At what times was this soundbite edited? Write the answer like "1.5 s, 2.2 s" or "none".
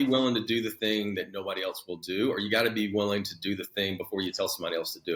none